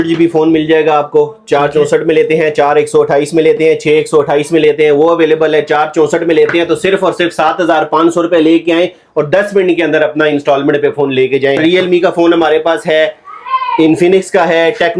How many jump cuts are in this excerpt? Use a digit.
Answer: 1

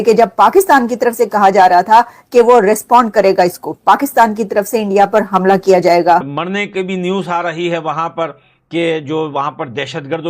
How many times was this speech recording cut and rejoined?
1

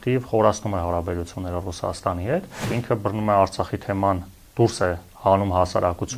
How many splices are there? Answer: 1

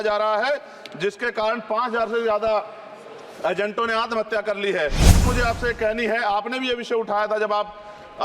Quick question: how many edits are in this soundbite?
1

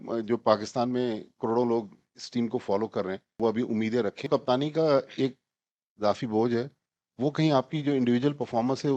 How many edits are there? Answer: 2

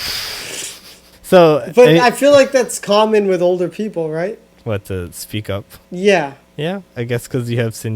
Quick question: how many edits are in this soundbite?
4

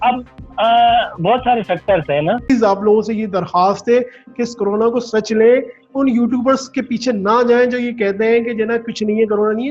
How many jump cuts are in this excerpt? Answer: 1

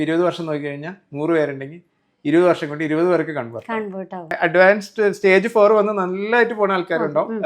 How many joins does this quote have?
1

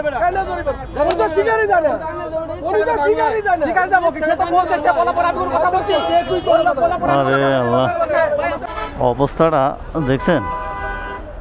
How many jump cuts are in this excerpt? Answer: 1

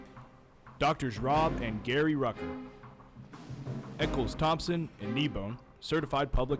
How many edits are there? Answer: 0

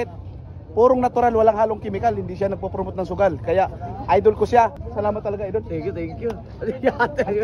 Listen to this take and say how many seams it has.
1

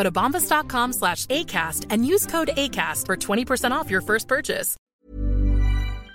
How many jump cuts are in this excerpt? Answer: 1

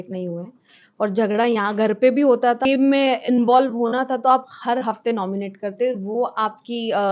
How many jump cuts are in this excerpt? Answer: 1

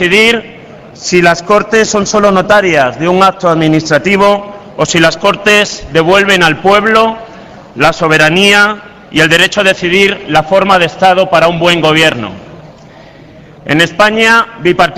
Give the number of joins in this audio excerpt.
1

